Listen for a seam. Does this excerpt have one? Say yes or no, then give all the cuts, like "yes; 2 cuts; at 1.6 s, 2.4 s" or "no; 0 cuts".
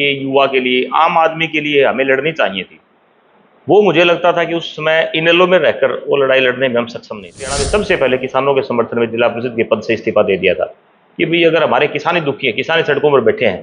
yes; 1 cut; at 7.6 s